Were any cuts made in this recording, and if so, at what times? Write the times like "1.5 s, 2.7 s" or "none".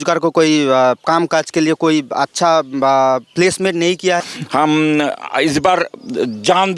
4.2 s